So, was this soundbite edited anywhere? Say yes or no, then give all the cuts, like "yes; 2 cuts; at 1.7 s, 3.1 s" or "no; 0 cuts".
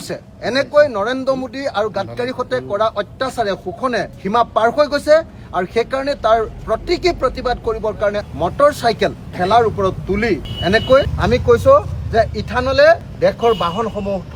no; 0 cuts